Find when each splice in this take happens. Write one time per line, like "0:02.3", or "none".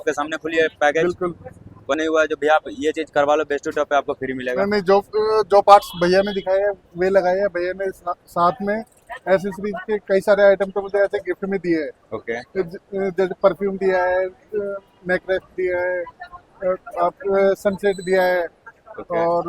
0:01.9